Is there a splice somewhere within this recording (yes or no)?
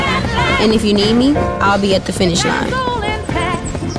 no